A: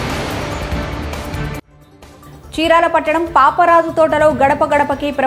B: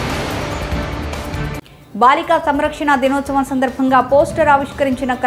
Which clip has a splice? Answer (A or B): B